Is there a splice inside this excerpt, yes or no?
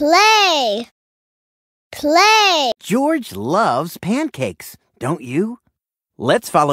no